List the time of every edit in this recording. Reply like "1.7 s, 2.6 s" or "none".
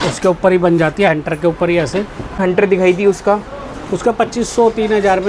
2.4 s